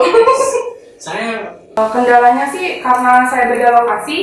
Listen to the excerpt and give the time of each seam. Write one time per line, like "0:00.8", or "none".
0:01.8